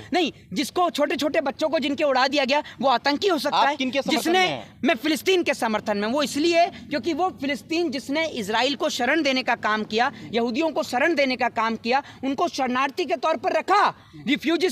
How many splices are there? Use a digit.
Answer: 0